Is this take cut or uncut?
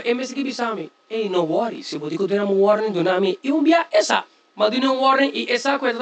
uncut